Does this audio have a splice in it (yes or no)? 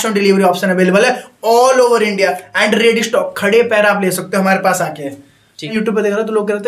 yes